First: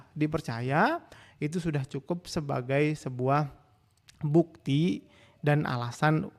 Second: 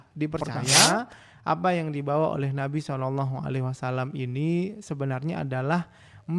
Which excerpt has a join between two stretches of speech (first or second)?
second